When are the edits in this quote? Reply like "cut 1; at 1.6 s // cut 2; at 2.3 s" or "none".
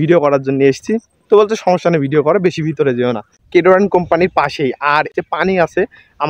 cut 1; at 3.4 s // cut 2; at 5.1 s